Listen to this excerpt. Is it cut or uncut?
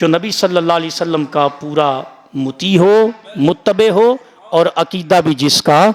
uncut